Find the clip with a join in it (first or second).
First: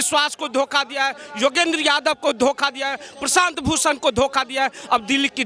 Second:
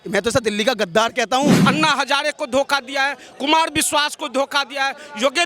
second